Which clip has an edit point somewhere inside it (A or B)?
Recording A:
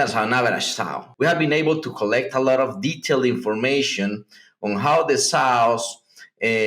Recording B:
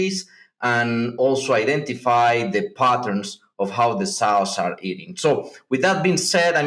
A